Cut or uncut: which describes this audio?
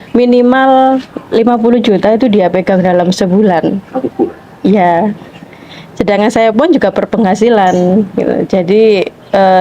uncut